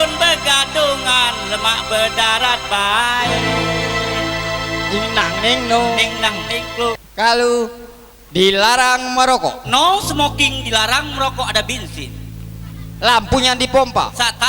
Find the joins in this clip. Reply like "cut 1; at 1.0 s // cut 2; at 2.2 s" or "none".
cut 1; at 7.0 s